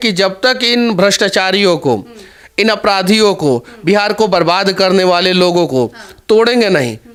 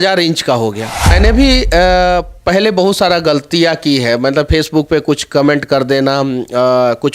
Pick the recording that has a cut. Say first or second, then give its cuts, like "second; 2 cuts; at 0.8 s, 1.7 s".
second; 1 cut; at 1.1 s